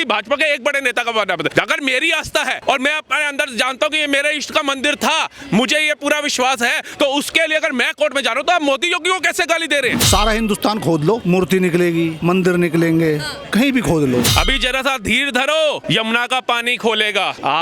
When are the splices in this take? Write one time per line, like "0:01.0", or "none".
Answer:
0:10.0
0:14.3